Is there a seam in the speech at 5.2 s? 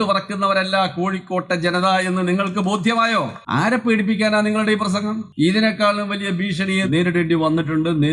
yes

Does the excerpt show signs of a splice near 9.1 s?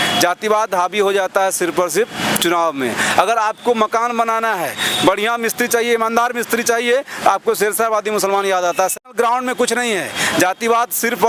yes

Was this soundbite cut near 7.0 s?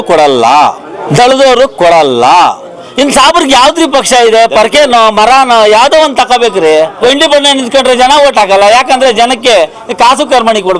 yes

